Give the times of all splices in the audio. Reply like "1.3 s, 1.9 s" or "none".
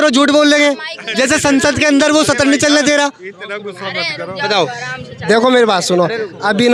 none